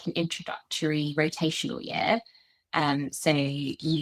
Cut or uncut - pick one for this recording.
uncut